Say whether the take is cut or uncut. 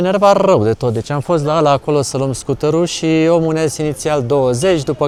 uncut